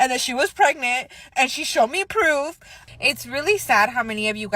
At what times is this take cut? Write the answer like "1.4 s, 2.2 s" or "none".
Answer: 2.8 s